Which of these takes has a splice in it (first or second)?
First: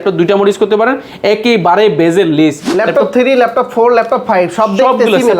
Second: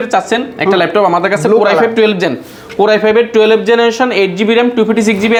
first